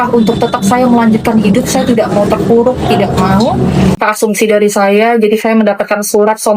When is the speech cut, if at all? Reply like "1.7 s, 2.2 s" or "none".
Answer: 4.0 s